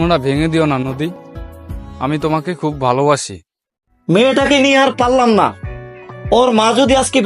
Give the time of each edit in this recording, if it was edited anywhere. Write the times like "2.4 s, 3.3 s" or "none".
3.7 s